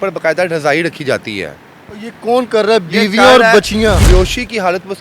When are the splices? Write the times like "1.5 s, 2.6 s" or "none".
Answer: 4.0 s